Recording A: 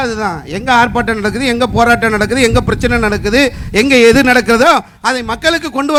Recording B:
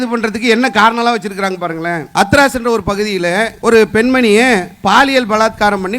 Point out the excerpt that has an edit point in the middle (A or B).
B